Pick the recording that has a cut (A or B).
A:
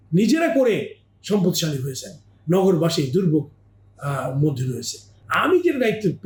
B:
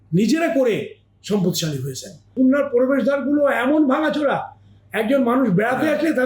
B